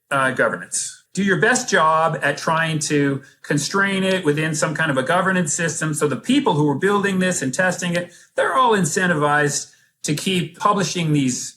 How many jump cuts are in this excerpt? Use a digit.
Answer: 2